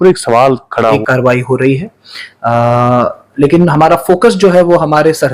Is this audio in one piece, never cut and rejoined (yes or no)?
no